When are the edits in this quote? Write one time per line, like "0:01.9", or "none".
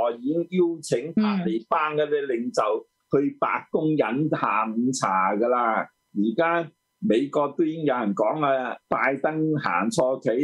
0:06.0
0:08.8